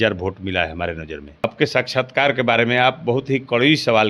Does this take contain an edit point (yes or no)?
yes